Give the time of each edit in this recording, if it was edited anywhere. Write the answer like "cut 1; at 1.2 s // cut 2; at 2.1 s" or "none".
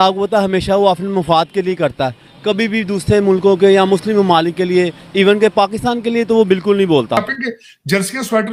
cut 1; at 7.3 s